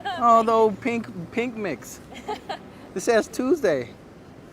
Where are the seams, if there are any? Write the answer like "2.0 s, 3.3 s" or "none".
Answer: 2.8 s

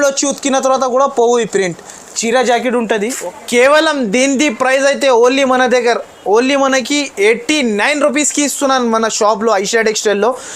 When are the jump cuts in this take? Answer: 3.1 s

